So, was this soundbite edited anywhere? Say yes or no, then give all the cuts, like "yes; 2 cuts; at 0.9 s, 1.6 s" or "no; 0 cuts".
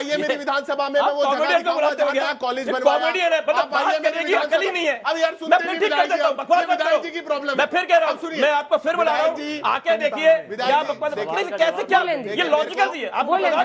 no; 0 cuts